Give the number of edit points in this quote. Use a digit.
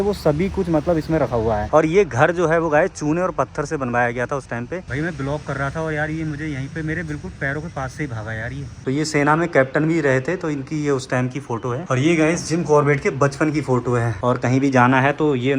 5